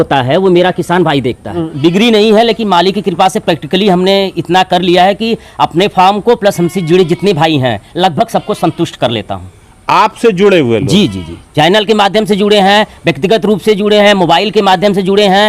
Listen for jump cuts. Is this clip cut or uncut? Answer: cut